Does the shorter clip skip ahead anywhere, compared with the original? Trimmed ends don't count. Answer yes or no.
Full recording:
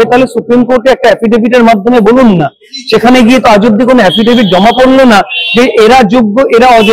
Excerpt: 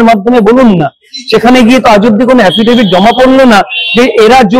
no